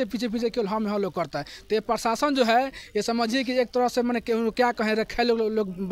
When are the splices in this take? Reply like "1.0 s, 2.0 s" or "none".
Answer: none